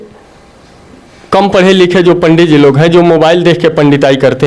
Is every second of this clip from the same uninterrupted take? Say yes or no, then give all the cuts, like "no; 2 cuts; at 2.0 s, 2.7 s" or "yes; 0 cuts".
yes; 0 cuts